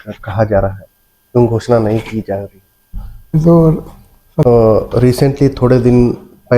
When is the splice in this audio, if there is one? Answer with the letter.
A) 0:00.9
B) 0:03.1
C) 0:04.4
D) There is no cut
C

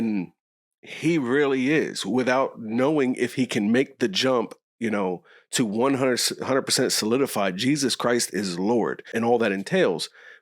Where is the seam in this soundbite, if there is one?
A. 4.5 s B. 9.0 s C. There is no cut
B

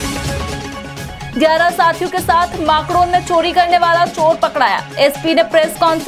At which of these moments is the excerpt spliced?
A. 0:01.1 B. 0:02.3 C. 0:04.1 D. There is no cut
A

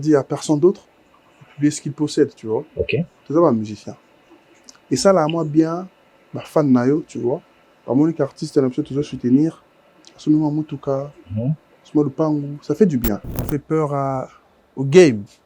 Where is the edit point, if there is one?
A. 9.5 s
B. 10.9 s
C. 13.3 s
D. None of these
C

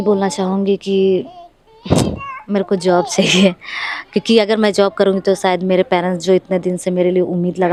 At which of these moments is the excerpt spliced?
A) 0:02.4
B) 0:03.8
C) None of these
C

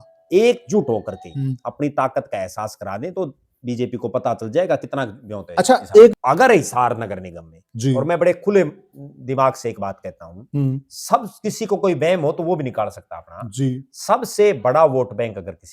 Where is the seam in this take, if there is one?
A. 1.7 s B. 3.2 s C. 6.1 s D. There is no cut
C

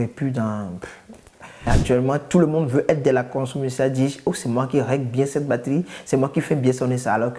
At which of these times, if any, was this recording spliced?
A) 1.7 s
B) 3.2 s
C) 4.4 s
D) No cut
A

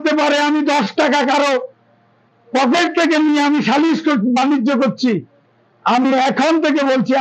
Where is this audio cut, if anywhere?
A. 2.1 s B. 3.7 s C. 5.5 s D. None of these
D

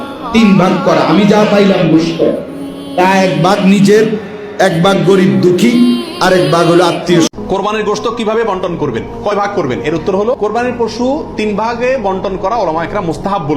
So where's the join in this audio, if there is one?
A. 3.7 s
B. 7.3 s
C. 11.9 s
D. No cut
B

